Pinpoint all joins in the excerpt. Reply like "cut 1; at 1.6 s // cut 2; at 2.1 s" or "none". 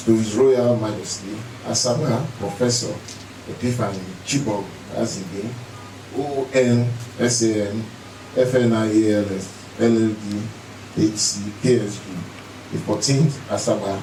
none